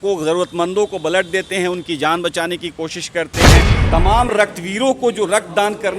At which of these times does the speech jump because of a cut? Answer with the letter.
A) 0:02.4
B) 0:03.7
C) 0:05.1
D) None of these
B